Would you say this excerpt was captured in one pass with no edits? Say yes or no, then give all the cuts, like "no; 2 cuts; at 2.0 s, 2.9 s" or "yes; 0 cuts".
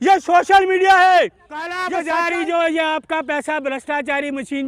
no; 1 cut; at 1.9 s